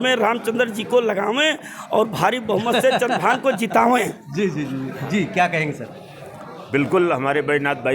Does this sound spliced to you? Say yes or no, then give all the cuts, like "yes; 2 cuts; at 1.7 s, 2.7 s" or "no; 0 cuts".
no; 0 cuts